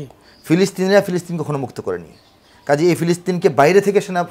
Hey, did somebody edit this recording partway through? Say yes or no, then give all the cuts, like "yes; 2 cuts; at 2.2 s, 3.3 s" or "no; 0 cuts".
no; 0 cuts